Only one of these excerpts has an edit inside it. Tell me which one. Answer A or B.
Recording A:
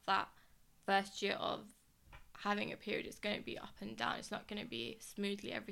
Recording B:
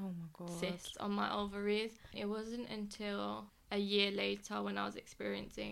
B